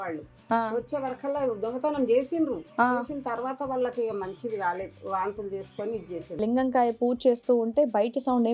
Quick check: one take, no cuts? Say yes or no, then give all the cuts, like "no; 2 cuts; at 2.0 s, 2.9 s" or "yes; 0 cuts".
no; 1 cut; at 6.4 s